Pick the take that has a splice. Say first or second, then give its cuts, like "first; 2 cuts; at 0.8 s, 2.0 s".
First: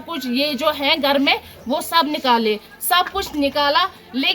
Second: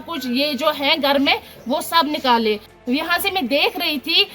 second; 1 cut; at 2.7 s